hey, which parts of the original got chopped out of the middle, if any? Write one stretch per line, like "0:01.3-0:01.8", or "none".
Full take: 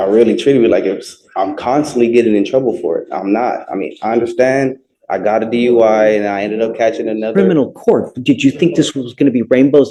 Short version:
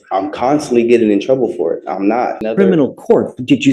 0:03.7-0:07.2